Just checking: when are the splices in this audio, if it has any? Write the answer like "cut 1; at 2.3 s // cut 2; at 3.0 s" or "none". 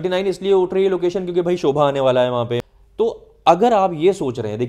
cut 1; at 2.6 s

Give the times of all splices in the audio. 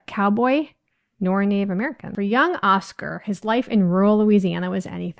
cut 1; at 2.0 s

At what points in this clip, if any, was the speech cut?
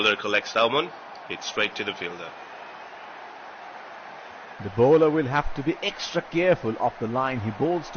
cut 1; at 2.2 s // cut 2; at 4.6 s

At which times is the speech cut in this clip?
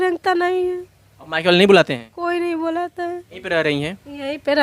cut 1; at 1.2 s

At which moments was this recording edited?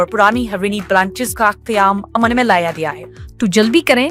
cut 1; at 3.0 s

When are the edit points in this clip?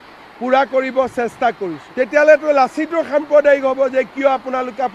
cut 1; at 1.8 s

